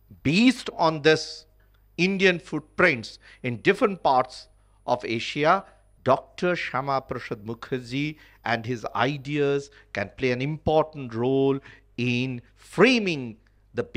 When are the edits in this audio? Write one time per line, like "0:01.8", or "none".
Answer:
none